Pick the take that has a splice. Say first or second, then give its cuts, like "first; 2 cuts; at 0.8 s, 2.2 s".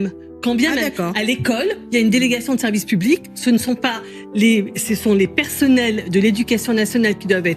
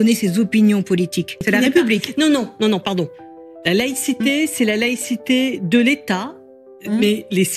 second; 1 cut; at 1.5 s